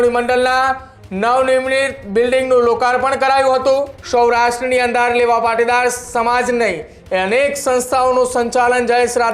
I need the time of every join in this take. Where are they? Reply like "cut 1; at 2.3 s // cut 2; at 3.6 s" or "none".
cut 1; at 4.0 s

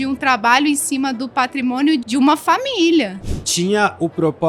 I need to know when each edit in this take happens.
cut 1; at 2.0 s // cut 2; at 3.3 s

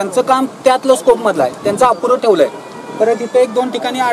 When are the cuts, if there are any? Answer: none

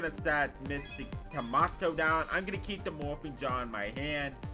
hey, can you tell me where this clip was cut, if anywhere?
none

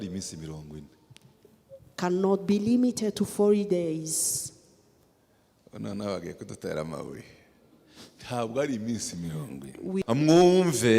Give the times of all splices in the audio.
cut 1; at 10.0 s

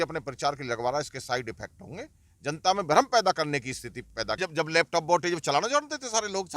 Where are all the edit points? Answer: cut 1; at 4.4 s

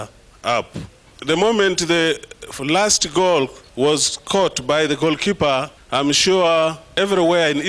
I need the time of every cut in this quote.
cut 1; at 1.1 s // cut 2; at 3.6 s // cut 3; at 5.8 s // cut 4; at 6.9 s

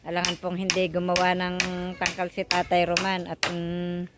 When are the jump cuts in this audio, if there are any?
none

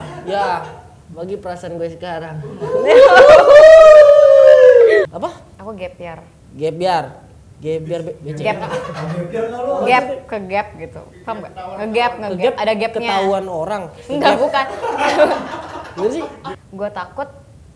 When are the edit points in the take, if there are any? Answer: cut 1; at 5.1 s // cut 2; at 16.5 s

